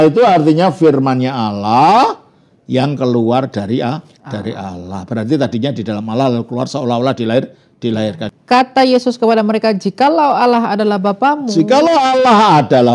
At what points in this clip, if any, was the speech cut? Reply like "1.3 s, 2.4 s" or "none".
8.2 s